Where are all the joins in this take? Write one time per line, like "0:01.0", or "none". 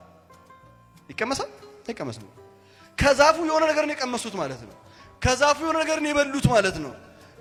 none